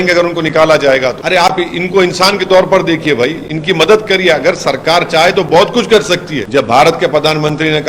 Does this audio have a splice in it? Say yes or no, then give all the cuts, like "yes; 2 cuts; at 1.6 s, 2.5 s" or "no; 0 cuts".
yes; 2 cuts; at 1.2 s, 6.4 s